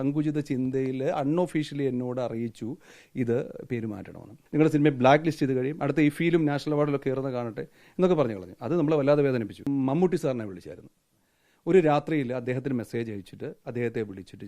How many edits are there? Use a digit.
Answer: 2